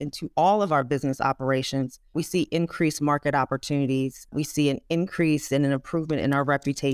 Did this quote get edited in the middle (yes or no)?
yes